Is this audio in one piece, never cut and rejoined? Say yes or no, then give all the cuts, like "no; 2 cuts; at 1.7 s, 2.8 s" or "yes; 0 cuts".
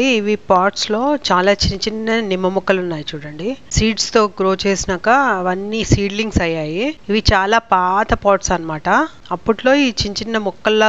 yes; 0 cuts